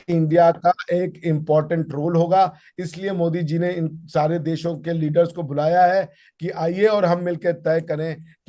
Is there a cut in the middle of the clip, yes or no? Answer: no